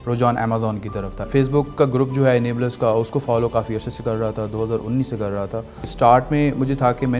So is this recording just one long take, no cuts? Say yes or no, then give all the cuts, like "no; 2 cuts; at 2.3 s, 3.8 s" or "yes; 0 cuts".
no; 2 cuts; at 1.3 s, 5.9 s